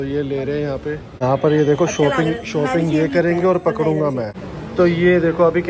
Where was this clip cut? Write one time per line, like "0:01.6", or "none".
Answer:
0:01.1
0:04.4